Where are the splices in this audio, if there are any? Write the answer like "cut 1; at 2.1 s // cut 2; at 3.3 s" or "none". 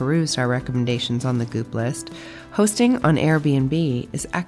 none